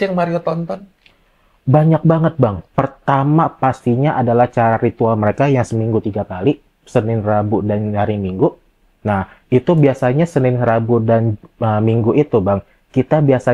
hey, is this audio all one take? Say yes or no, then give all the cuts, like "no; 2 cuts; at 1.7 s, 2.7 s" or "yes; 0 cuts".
yes; 0 cuts